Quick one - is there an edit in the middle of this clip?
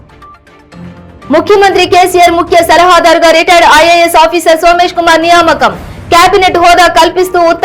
yes; 1 cut; at 1.3 s

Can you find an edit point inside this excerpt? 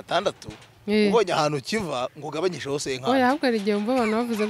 no; 0 cuts

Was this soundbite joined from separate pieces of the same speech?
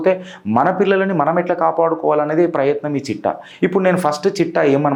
no; 0 cuts

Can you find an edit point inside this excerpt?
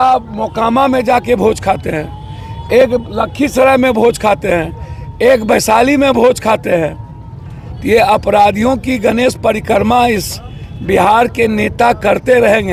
no; 0 cuts

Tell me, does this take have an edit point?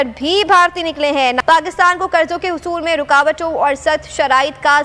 yes; 1 cut; at 1.4 s

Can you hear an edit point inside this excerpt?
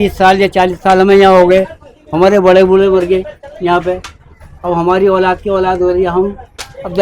no; 0 cuts

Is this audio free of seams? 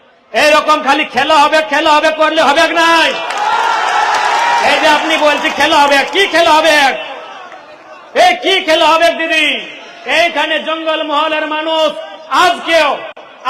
yes; 0 cuts

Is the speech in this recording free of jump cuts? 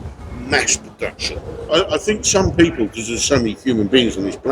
no; 1 cut; at 1.7 s

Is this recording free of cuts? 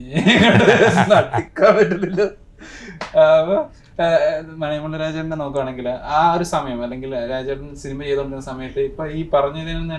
yes; 0 cuts

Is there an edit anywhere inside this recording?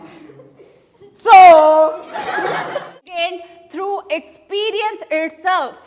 yes; 1 cut; at 2.8 s

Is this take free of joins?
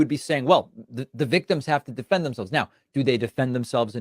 no; 1 cut; at 2.7 s

